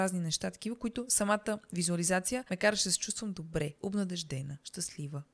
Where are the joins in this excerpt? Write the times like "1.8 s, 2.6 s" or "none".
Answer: 2.4 s